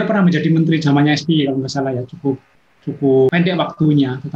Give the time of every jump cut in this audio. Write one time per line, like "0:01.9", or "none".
0:03.3